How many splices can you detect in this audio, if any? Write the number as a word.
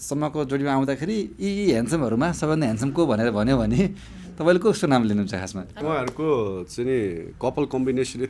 one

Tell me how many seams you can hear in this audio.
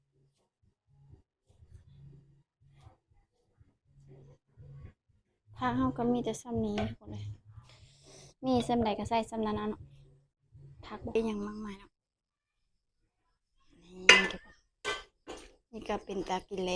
one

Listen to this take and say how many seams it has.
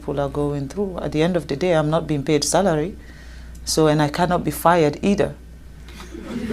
zero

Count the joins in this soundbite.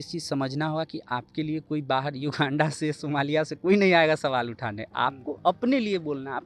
zero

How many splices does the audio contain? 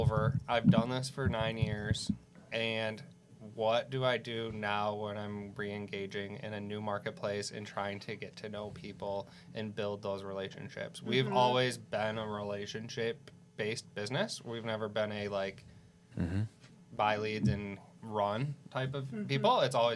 zero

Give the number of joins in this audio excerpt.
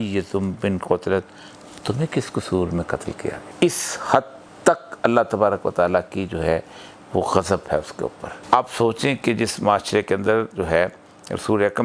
two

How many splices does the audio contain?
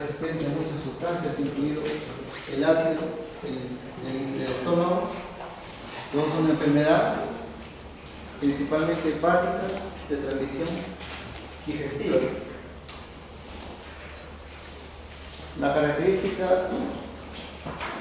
one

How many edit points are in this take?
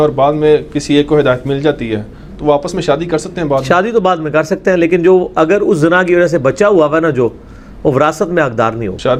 zero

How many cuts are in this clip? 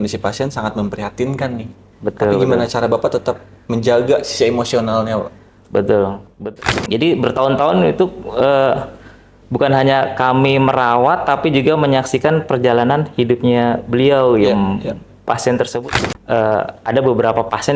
two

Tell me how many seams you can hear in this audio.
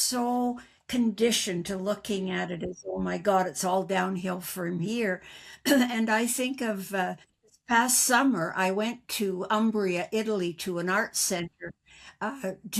zero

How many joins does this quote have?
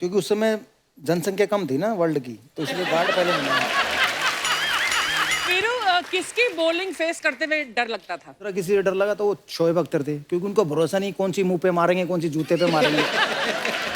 two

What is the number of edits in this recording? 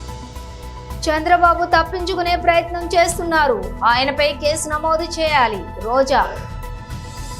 zero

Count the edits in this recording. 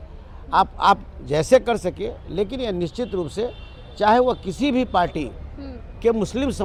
zero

